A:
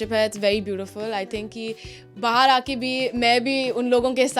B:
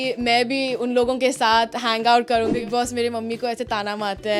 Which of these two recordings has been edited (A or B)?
B